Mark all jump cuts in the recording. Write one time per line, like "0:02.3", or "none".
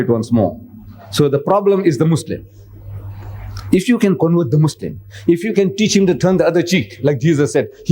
0:04.5
0:06.9